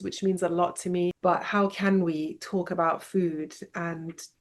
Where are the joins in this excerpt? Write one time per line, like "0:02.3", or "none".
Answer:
0:01.2